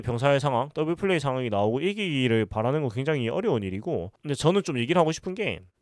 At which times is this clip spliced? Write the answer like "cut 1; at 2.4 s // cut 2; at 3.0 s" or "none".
cut 1; at 4.2 s